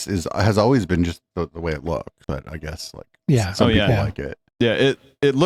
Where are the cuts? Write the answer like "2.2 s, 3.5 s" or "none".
none

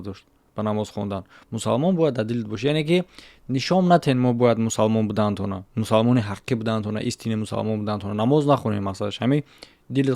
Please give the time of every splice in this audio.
5.6 s

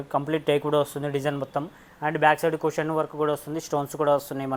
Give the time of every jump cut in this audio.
none

